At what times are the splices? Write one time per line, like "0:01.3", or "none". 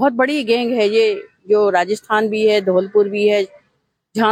none

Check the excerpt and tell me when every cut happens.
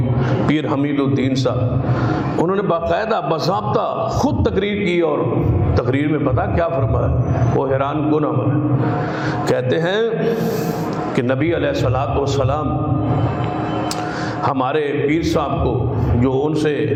none

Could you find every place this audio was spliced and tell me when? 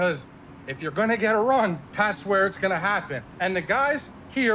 0:01.8
0:03.2

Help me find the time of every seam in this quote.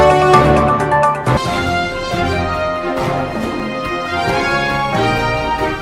0:01.2

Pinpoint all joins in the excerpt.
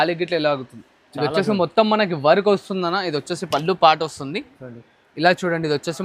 none

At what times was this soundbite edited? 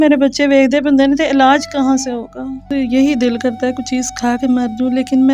0:02.7

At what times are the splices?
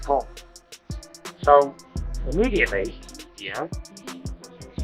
none

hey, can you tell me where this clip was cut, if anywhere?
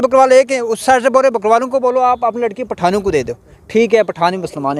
none

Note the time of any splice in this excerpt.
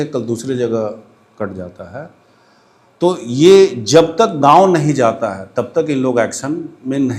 none

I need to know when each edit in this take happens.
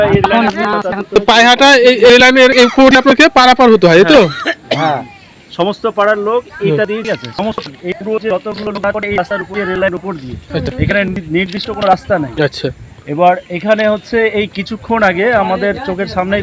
none

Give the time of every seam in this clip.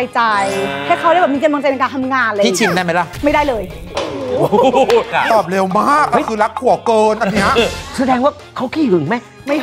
0:05.2

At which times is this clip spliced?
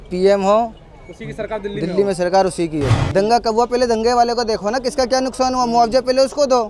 0:02.9

